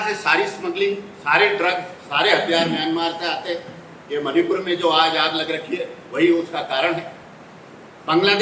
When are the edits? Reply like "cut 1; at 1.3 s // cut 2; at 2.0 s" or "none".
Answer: none